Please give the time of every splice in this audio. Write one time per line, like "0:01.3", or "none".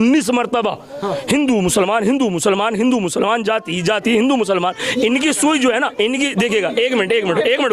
none